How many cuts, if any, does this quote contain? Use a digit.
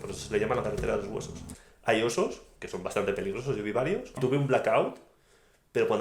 2